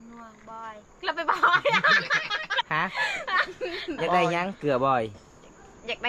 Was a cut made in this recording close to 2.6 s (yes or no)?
yes